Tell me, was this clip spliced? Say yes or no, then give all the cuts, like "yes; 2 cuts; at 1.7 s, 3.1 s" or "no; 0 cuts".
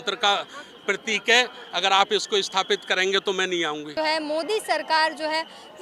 yes; 1 cut; at 3.9 s